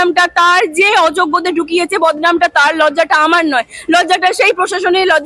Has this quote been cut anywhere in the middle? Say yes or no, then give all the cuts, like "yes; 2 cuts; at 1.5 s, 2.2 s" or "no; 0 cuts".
no; 0 cuts